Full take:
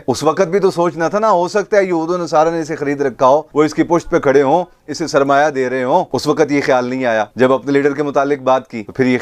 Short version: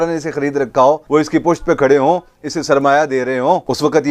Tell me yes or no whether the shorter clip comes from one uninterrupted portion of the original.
yes